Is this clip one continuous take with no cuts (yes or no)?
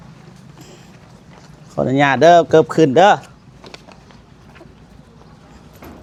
yes